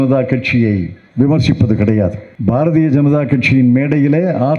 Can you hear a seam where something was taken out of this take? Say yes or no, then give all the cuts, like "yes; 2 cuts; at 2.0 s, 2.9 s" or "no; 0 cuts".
yes; 1 cut; at 2.3 s